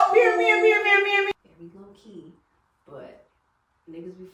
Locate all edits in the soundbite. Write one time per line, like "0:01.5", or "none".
0:01.3